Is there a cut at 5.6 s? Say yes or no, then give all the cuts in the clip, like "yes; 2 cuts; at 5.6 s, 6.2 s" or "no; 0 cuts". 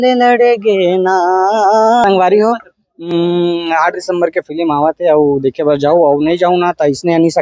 no; 1 cut; at 2.0 s